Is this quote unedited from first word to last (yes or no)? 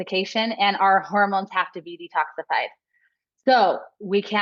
yes